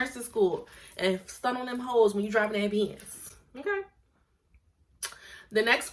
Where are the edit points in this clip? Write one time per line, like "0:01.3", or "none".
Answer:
none